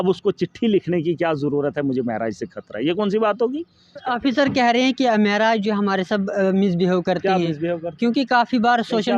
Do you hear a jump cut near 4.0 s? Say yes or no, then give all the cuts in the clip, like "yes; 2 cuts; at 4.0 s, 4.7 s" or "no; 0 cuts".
yes; 1 cut; at 4.0 s